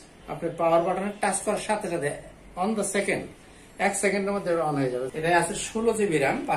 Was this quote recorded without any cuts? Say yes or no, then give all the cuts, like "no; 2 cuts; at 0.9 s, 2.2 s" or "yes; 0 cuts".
no; 1 cut; at 5.1 s